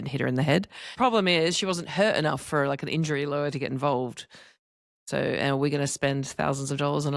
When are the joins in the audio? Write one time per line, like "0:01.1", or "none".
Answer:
0:00.9